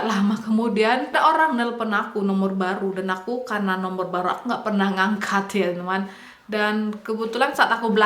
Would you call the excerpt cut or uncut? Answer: cut